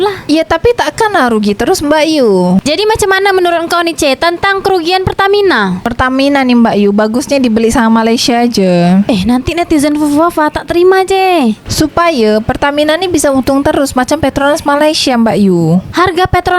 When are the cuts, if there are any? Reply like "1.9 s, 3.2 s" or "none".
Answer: 2.6 s